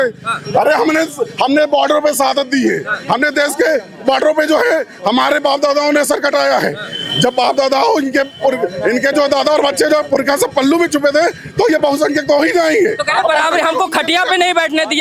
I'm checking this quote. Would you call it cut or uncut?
uncut